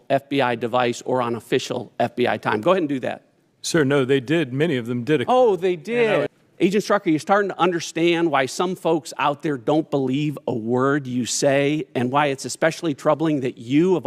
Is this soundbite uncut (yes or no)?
no